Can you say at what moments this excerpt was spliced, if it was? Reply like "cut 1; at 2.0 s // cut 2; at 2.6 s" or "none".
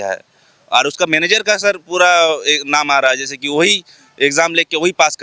none